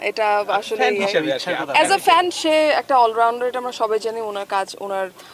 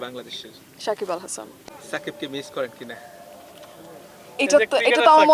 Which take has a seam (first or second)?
second